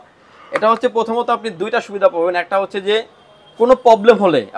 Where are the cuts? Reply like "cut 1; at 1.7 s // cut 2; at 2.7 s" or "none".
none